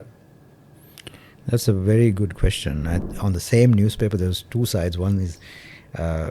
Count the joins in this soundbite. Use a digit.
1